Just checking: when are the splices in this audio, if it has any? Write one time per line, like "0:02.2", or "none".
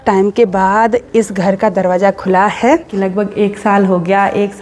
0:02.9